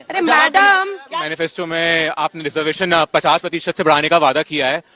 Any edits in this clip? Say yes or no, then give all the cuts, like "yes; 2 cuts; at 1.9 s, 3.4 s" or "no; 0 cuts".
yes; 1 cut; at 1.2 s